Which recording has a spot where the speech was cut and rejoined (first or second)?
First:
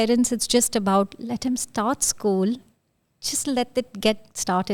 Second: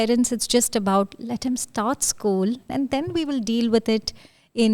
second